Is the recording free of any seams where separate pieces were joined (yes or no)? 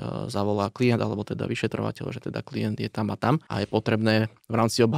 no